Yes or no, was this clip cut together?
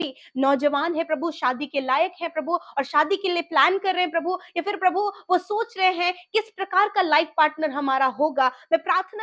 no